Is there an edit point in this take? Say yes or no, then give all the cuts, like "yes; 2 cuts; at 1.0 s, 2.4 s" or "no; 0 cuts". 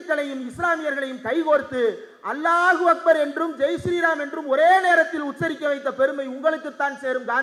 no; 0 cuts